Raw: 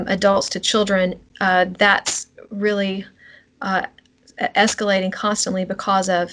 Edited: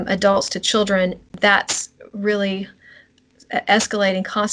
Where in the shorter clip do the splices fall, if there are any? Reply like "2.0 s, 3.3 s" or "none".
1.3 s, 3.1 s